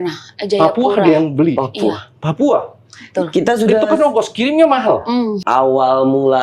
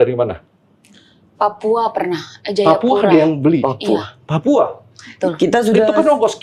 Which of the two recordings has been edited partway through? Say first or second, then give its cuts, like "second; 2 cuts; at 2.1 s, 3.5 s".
first; 1 cut; at 5.4 s